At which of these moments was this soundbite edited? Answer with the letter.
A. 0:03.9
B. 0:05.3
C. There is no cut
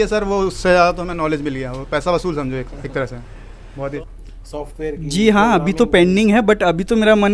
A